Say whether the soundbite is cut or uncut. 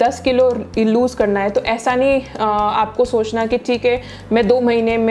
uncut